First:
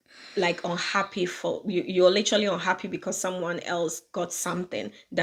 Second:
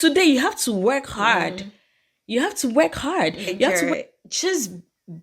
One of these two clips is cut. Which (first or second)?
second